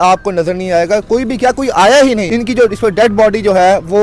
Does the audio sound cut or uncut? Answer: cut